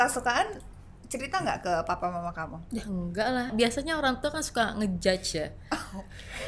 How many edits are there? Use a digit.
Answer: 1